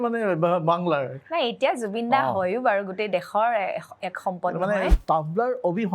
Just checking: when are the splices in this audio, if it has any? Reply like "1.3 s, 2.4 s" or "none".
4.9 s